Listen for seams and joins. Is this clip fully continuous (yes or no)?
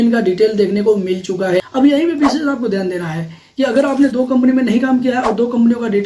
no